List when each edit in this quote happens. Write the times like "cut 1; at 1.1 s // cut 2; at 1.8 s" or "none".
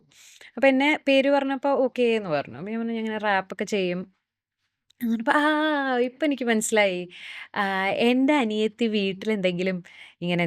none